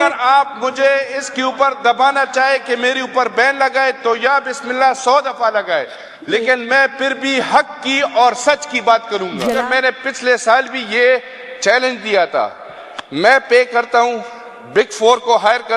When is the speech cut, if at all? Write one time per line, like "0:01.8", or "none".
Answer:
0:09.6